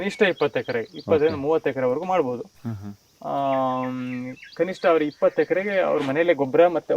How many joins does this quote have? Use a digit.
0